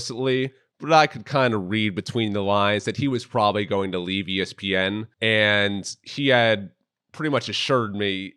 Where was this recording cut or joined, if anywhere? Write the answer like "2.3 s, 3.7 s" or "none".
5.1 s